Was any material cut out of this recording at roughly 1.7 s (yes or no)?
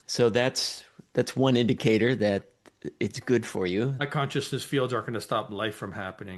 no